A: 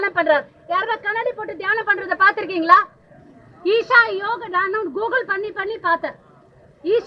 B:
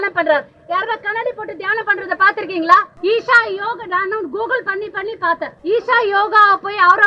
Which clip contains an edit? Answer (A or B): B